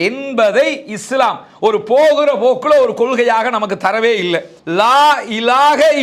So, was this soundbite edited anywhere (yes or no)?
yes